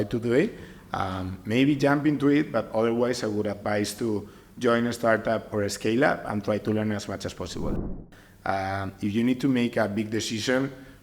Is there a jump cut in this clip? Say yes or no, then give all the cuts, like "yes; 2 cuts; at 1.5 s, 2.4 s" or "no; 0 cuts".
yes; 1 cut; at 8.0 s